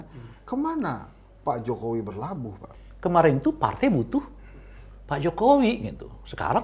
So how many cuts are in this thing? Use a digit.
1